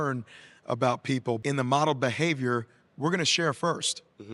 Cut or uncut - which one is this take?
cut